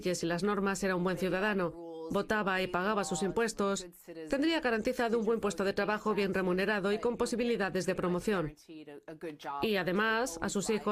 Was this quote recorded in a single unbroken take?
no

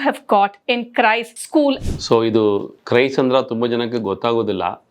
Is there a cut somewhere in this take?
yes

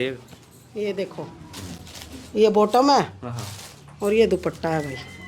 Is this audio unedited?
yes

